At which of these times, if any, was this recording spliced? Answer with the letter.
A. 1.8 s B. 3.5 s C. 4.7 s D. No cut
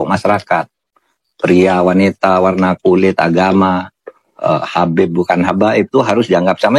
D